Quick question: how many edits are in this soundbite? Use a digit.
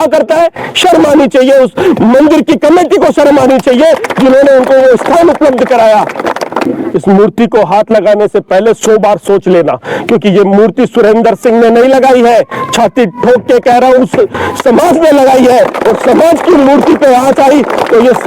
1